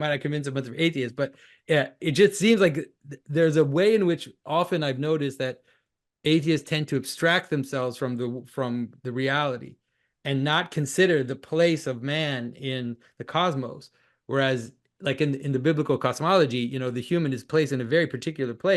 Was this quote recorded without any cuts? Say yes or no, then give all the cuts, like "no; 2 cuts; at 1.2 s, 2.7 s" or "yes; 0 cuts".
yes; 0 cuts